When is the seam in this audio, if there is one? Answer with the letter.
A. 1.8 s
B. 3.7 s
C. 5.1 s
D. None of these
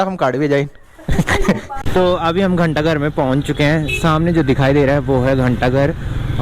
A